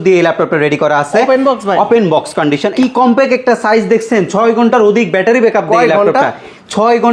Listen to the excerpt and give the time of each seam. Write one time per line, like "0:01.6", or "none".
0:02.7